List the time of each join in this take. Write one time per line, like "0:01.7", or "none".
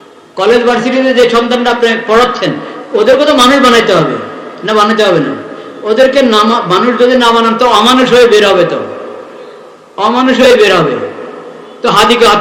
none